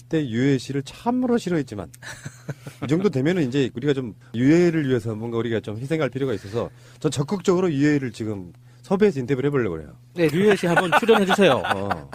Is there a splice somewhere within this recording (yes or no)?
no